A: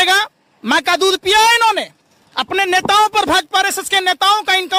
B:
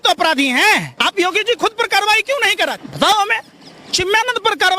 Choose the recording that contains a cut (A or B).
B